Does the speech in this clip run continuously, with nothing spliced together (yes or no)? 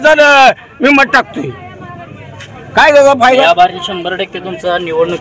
yes